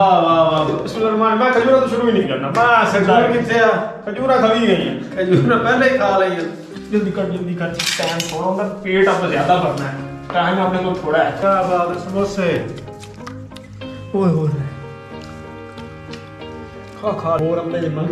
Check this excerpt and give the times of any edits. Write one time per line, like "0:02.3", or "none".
none